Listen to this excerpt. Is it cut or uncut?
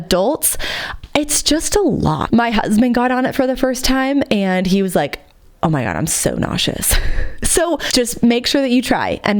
cut